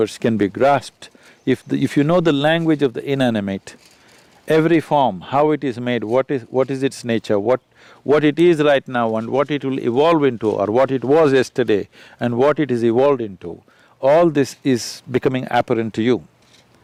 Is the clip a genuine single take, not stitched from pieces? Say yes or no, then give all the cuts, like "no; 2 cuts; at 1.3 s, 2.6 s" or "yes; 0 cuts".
yes; 0 cuts